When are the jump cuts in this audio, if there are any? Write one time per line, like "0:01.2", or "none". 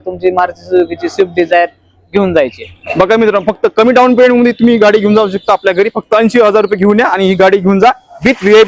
none